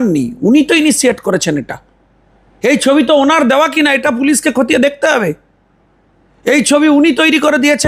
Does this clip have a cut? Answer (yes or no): no